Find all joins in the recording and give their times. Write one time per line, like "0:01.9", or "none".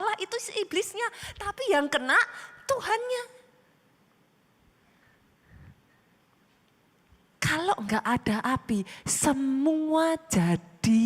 0:01.6